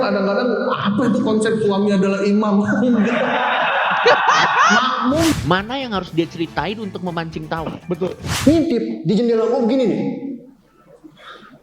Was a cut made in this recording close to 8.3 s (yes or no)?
yes